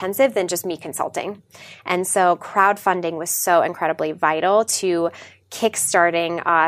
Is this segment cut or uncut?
uncut